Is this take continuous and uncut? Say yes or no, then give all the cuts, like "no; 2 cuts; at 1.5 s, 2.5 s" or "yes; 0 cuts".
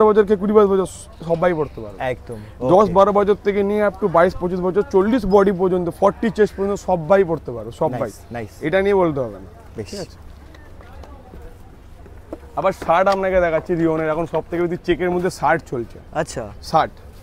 yes; 0 cuts